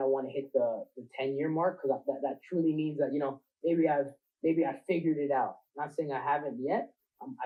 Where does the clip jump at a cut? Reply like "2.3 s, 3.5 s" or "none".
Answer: none